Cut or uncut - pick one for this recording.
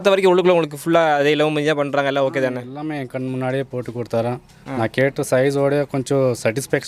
uncut